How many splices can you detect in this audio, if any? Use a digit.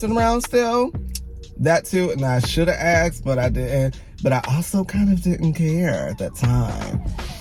0